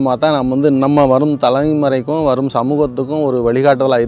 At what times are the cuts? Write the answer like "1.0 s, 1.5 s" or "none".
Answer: none

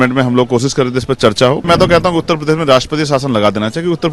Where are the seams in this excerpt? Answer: 1.7 s

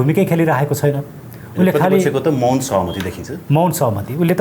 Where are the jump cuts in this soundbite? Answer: none

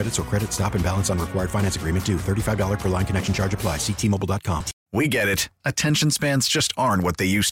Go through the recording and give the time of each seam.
4.8 s

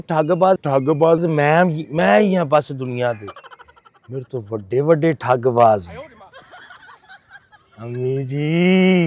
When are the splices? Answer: none

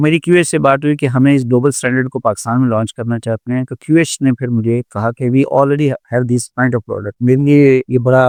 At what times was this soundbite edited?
none

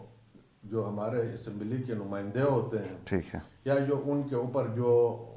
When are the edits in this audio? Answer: none

